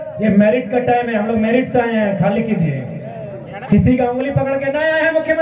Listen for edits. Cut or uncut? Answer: uncut